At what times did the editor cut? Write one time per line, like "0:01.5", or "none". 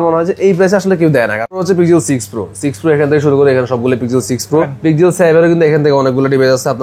0:01.6
0:04.7